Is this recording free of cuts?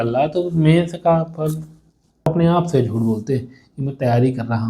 no; 1 cut; at 2.3 s

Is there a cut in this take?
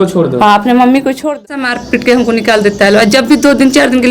yes; 1 cut; at 1.8 s

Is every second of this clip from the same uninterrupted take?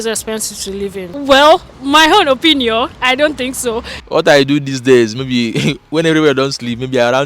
no; 2 cuts; at 1.1 s, 4.1 s

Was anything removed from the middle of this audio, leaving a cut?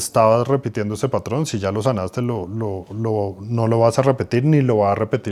no; 0 cuts

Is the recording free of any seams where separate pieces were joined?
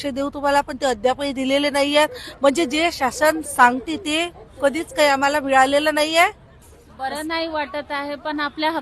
yes; 0 cuts

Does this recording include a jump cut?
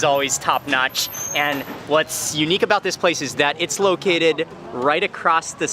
no; 0 cuts

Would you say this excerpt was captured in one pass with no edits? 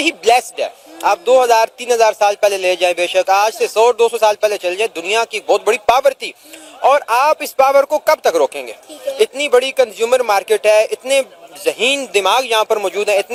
yes; 0 cuts

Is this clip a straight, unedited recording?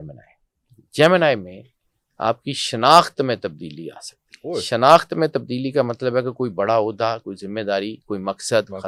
yes; 0 cuts

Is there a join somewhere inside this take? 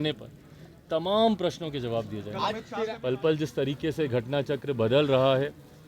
yes; 1 cut; at 2.9 s

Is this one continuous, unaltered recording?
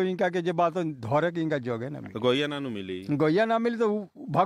yes; 0 cuts

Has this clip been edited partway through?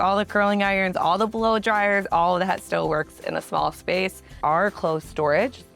yes; 1 cut; at 4.4 s

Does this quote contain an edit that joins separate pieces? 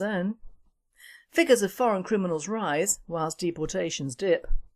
yes; 1 cut; at 1.6 s

